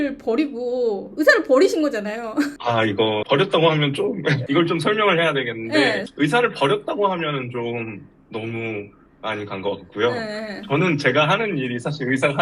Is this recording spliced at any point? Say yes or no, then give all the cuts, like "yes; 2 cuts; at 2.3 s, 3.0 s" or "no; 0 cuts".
no; 0 cuts